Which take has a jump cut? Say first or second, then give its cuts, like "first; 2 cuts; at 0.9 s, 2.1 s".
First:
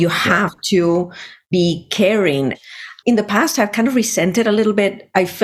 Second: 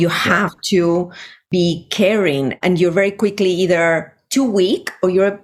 first; 1 cut; at 2.6 s